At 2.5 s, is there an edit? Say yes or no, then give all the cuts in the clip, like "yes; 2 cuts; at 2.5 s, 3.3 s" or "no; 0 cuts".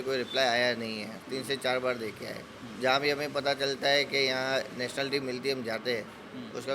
no; 0 cuts